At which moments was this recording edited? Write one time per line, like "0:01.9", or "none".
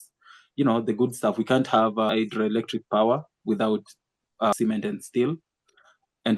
0:02.1
0:04.5